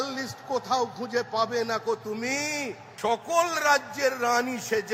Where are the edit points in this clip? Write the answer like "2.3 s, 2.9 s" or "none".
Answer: 2.8 s